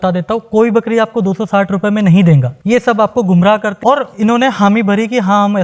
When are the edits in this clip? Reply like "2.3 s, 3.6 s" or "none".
2.5 s, 3.7 s